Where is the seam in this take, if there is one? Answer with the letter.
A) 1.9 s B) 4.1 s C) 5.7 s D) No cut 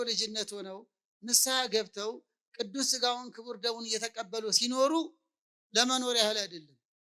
D